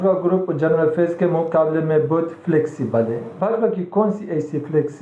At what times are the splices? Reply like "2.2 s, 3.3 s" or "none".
none